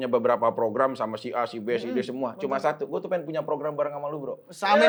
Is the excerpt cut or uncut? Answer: uncut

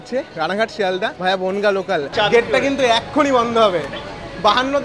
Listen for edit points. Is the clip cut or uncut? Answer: cut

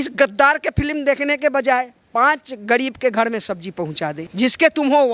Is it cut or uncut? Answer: cut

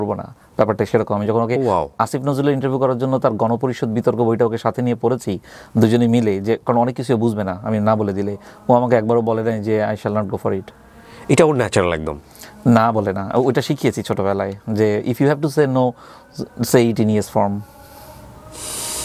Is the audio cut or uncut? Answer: uncut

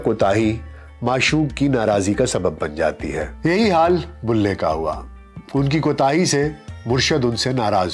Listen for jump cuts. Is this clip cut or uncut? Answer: uncut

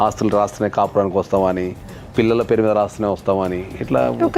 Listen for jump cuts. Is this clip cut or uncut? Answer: uncut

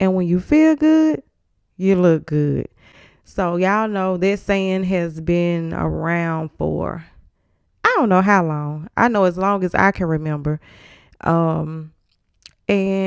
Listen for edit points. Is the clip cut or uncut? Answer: uncut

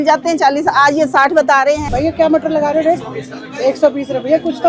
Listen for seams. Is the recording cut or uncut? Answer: cut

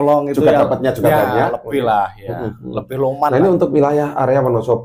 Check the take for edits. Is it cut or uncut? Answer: cut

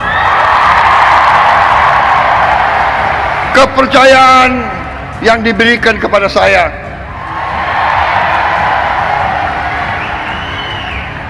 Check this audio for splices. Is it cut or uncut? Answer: uncut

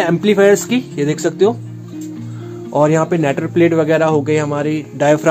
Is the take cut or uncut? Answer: uncut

